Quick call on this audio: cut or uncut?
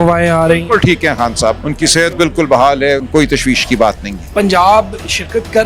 cut